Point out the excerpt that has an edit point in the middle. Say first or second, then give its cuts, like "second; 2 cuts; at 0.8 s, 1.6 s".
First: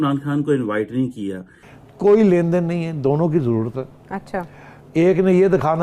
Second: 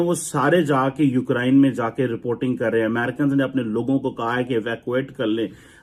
first; 1 cut; at 1.6 s